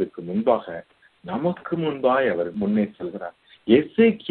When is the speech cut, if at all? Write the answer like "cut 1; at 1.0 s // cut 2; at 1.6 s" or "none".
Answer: cut 1; at 2.5 s